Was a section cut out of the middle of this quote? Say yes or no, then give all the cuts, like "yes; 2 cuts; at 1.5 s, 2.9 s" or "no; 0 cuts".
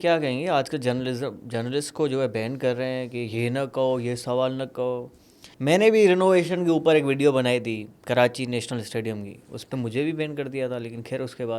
no; 0 cuts